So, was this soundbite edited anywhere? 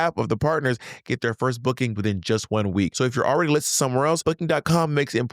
yes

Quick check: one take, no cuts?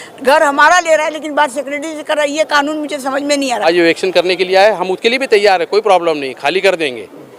no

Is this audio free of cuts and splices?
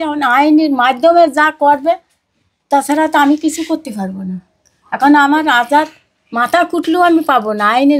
yes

